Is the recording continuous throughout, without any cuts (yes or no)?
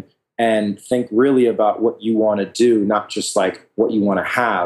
yes